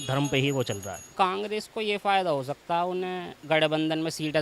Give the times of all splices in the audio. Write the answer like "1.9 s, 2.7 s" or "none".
1.0 s, 3.3 s

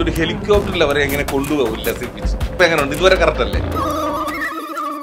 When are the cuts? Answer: 3.7 s

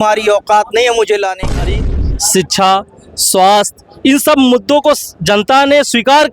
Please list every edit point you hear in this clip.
1.6 s

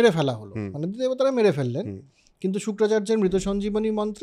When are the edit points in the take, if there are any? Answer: none

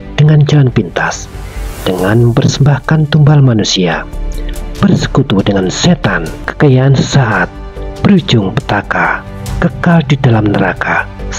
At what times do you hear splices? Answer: 6.4 s

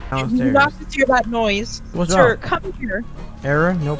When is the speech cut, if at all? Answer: 1.8 s

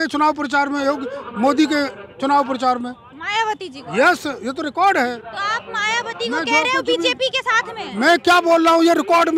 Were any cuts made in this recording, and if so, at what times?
none

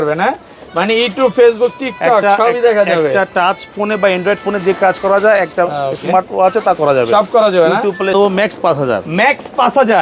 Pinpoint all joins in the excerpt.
8.2 s

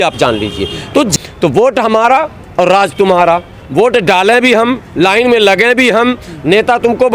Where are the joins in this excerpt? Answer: 1.1 s

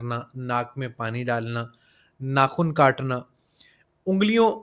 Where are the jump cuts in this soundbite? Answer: none

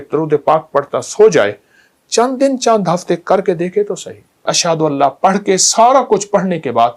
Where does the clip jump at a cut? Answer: 4.5 s

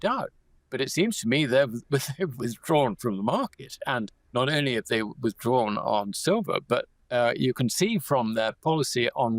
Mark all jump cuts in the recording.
4.2 s, 7.0 s

